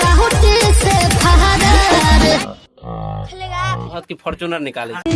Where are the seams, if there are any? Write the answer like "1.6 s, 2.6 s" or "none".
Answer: 2.4 s, 3.9 s